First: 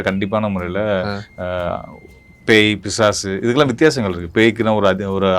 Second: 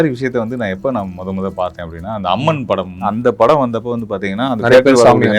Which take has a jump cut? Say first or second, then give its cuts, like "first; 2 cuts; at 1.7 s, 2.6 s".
second; 1 cut; at 3.1 s